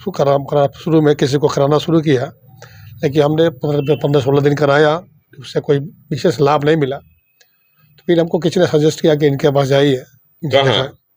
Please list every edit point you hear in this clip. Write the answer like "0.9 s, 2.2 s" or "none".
none